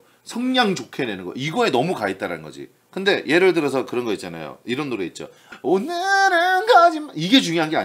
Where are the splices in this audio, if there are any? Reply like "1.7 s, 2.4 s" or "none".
5.5 s